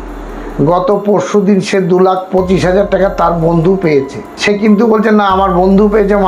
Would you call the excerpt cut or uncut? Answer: cut